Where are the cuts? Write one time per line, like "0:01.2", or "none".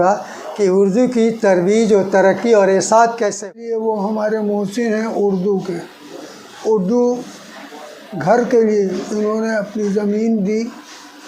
0:03.5